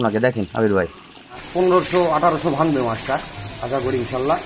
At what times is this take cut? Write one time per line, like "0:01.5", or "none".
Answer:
0:01.5